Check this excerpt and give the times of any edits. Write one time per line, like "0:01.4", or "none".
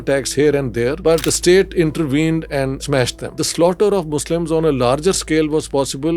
0:01.1
0:02.8